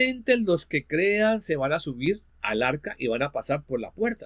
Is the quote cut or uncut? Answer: cut